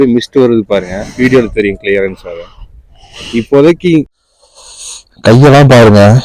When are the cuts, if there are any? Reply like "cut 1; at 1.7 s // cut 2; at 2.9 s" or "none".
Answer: cut 1; at 4.1 s